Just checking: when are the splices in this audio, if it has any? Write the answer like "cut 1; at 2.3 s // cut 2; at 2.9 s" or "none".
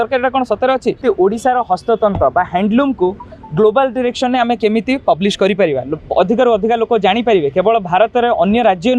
cut 1; at 1.0 s